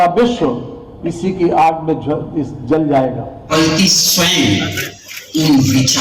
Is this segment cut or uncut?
cut